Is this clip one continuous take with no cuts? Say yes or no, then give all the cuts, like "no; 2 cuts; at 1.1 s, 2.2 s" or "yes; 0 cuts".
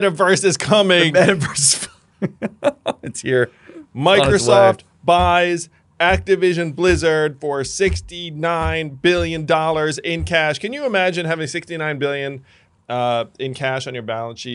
yes; 0 cuts